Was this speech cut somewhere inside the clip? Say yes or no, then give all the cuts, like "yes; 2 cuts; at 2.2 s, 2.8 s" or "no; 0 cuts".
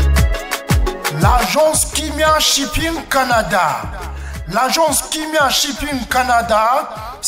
yes; 1 cut; at 1.1 s